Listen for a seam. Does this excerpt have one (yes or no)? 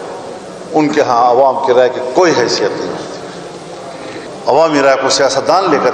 yes